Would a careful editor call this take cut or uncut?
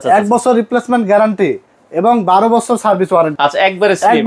cut